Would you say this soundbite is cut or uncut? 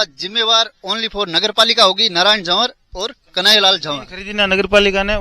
cut